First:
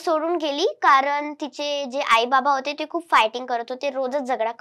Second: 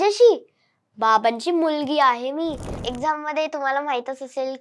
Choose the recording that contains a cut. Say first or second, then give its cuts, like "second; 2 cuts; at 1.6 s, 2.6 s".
second; 1 cut; at 2.8 s